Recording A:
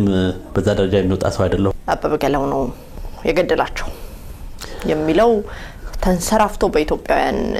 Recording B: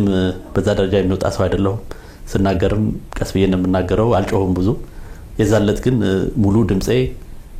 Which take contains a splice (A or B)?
A